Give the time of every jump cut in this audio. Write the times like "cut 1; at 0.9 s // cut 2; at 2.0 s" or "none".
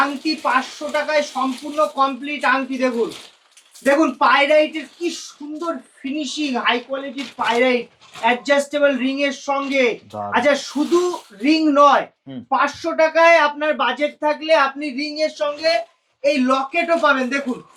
none